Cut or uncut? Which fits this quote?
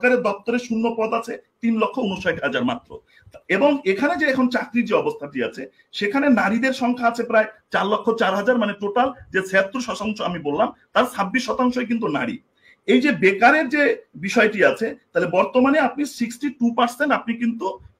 uncut